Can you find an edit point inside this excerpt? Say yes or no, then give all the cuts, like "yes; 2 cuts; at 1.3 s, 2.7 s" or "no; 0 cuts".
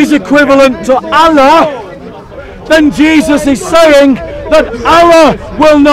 no; 0 cuts